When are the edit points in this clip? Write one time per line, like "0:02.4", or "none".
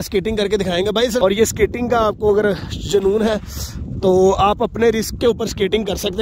0:01.2